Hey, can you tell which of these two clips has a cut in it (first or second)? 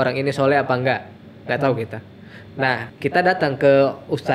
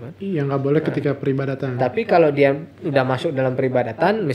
first